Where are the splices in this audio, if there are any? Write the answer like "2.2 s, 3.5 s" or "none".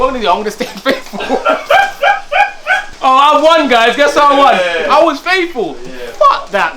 2.9 s